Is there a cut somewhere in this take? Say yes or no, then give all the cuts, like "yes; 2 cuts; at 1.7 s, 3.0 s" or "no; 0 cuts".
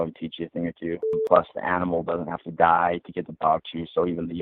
yes; 1 cut; at 1.1 s